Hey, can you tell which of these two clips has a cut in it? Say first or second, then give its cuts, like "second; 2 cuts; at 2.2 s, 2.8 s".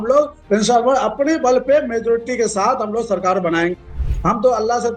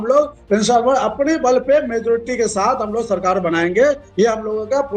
first; 1 cut; at 3.7 s